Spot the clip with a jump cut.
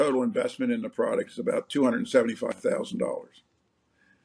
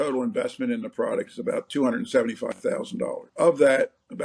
second; 1 cut; at 3.3 s

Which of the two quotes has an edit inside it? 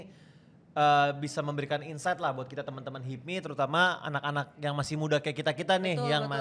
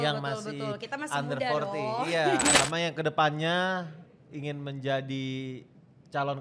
second; 1 cut; at 2.6 s

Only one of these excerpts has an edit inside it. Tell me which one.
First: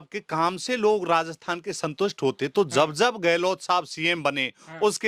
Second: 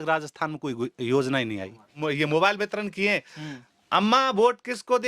second; 1 cut; at 2.0 s

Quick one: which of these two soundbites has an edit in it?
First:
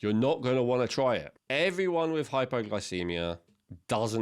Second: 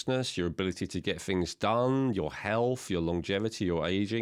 first; 1 cut; at 1.4 s

